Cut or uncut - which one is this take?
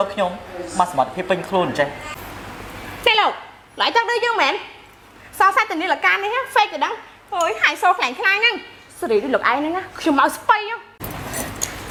uncut